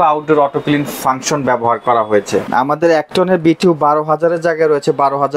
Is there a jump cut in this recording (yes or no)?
yes